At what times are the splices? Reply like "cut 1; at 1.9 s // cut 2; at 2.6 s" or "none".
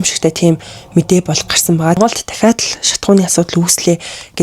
cut 1; at 2.0 s